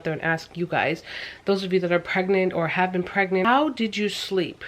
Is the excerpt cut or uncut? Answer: cut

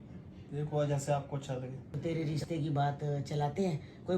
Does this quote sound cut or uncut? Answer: cut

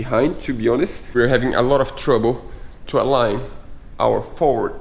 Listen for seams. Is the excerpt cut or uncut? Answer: cut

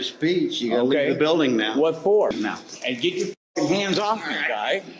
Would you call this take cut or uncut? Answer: cut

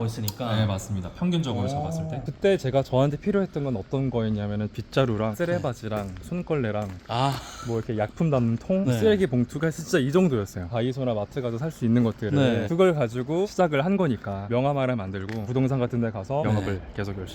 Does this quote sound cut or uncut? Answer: cut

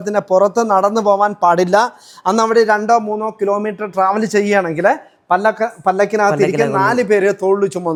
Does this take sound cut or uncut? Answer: uncut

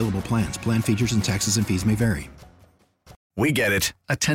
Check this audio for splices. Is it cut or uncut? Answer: cut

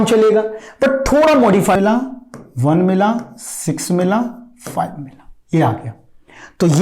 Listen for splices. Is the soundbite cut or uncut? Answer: cut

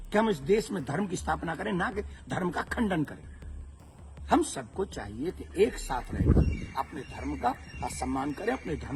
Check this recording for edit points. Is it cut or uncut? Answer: uncut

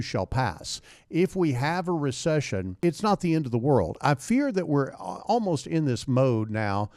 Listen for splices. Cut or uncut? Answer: cut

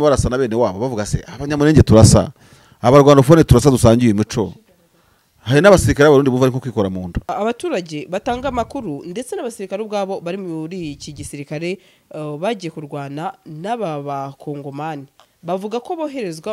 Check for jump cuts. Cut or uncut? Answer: cut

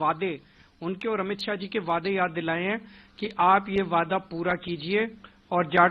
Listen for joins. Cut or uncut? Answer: uncut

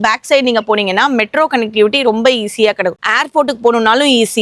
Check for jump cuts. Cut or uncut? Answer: uncut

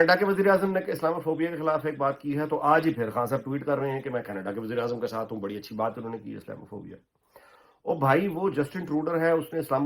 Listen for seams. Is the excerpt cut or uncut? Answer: uncut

